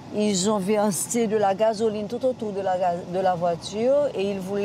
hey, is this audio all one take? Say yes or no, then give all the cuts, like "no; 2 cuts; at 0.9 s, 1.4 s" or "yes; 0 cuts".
yes; 0 cuts